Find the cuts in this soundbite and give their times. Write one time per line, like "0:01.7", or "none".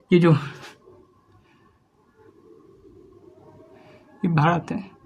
none